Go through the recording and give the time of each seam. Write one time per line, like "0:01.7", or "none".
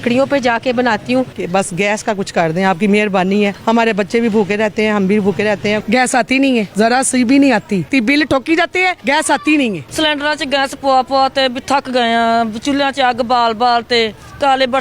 0:01.4
0:03.6
0:05.8
0:06.7
0:07.9
0:09.0
0:09.8